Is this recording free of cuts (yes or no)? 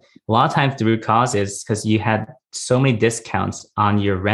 yes